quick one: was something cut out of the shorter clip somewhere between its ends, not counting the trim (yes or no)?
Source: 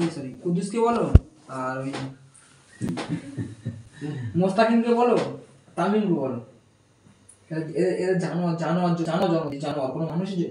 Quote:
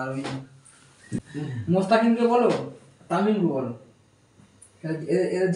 yes